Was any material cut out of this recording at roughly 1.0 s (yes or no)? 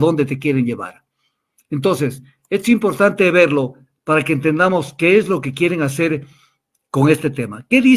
no